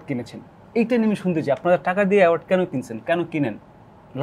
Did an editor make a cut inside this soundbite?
no; 0 cuts

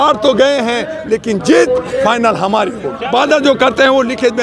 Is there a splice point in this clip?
yes; 1 cut; at 2.9 s

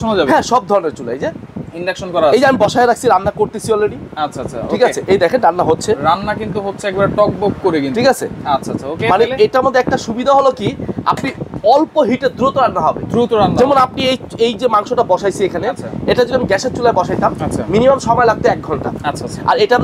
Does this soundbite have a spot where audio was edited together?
no; 0 cuts

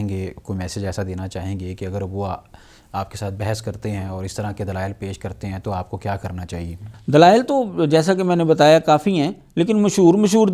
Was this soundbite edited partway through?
no; 0 cuts

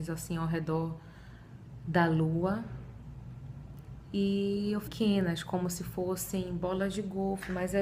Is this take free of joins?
yes; 0 cuts

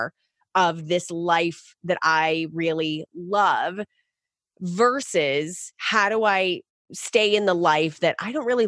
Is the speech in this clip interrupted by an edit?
yes; 1 cut; at 6.9 s

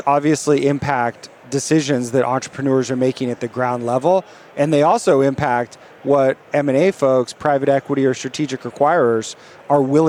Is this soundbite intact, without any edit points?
yes; 0 cuts

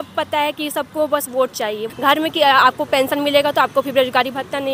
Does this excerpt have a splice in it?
yes; 1 cut; at 1.8 s

